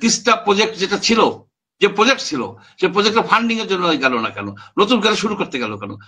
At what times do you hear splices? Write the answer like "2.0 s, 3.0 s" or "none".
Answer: none